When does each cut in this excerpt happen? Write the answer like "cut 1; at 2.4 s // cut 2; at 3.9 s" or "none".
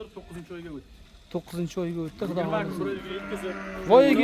cut 1; at 3.3 s